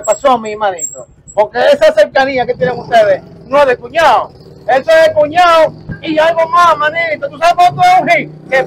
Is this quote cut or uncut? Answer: uncut